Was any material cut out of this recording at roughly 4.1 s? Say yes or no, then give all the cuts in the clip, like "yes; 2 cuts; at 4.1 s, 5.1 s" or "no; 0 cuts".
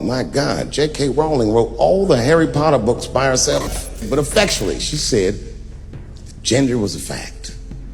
yes; 1 cut; at 4.1 s